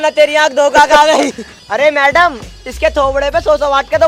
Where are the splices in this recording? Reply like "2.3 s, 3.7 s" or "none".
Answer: 1.6 s